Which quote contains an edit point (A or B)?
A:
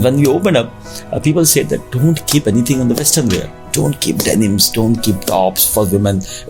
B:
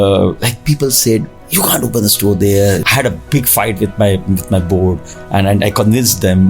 B